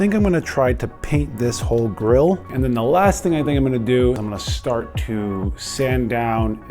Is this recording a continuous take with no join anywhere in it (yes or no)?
no